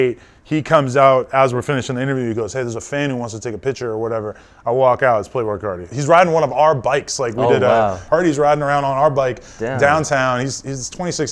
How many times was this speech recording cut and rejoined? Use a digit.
1